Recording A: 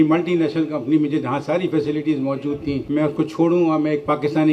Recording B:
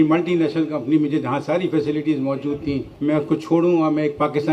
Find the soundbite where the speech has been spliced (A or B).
A